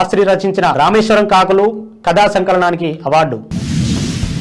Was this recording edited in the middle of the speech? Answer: no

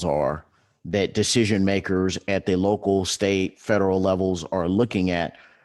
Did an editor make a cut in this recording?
no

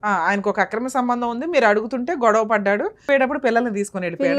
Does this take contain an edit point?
yes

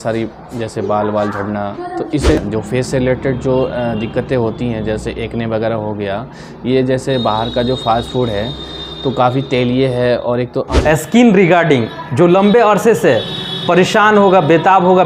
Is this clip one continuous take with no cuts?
no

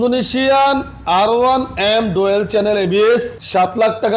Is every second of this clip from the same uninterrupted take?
yes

